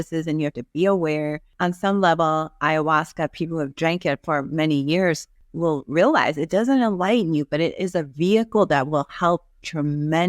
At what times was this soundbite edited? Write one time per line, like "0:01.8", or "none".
0:01.5
0:05.4